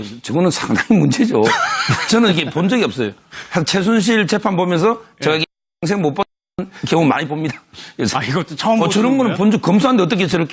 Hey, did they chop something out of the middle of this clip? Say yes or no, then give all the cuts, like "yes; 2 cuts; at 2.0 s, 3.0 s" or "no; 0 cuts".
yes; 1 cut; at 6.8 s